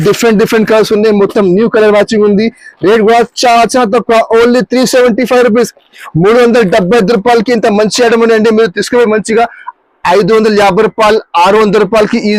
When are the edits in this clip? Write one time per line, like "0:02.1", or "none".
none